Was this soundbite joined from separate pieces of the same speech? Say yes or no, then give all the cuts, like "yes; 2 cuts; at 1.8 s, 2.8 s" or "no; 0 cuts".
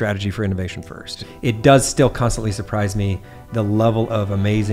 yes; 1 cut; at 1.2 s